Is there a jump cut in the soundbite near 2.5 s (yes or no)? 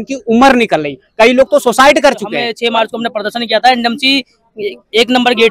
yes